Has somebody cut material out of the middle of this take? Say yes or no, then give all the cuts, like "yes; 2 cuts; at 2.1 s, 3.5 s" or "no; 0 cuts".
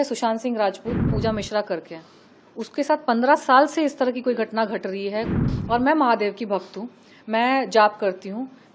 yes; 2 cuts; at 1.1 s, 5.4 s